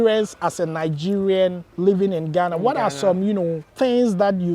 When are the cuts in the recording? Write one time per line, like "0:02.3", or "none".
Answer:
0:01.7
0:03.6